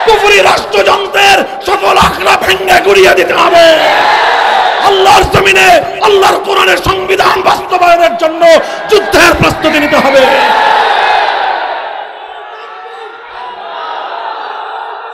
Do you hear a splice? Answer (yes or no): no